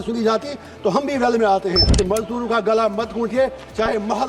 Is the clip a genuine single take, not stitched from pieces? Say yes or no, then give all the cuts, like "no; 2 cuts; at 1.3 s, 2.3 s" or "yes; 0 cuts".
no; 1 cut; at 1.9 s